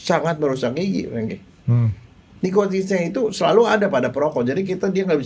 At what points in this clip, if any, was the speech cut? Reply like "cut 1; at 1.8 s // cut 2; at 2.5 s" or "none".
cut 1; at 2.3 s